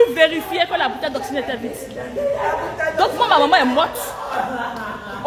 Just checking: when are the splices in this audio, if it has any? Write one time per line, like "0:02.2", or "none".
none